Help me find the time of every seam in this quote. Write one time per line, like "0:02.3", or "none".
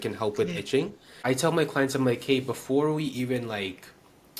0:01.2

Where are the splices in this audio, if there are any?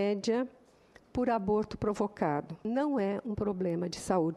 0:02.6

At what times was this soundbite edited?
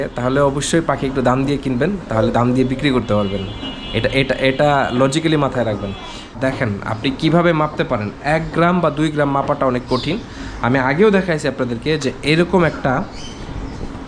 0:06.3

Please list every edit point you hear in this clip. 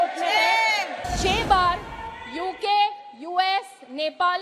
0:01.0

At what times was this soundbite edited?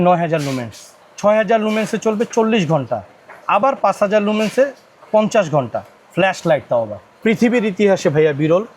0:07.1

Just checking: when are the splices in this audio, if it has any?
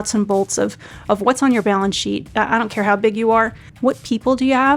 0:02.2
0:03.6

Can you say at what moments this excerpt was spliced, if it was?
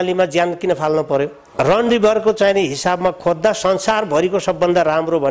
0:01.4

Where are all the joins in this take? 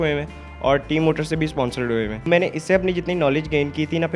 0:02.3

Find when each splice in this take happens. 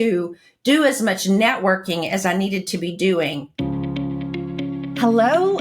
0:03.5

